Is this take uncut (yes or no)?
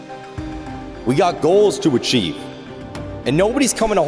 no